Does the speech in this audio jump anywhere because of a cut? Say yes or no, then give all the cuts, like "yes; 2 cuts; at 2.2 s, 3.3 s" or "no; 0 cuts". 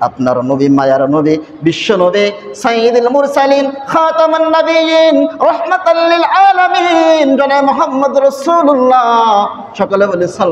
no; 0 cuts